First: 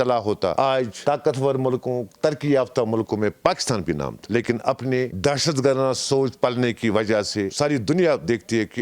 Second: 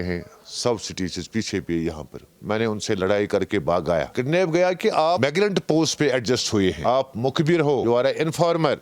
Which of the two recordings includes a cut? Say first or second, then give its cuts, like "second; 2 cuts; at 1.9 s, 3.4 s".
second; 4 cuts; at 4.1 s, 5.2 s, 6.8 s, 7.8 s